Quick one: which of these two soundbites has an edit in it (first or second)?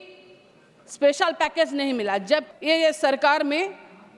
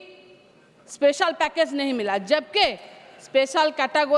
first